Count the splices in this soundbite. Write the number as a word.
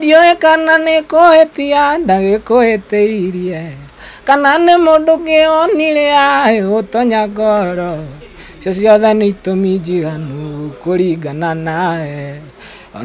zero